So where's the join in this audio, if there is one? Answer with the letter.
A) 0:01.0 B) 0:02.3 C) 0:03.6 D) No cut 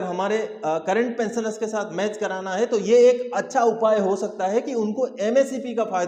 D